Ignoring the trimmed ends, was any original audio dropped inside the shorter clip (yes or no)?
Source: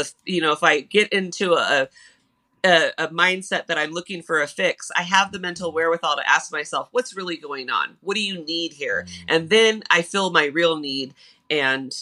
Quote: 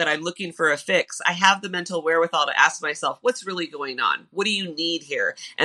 no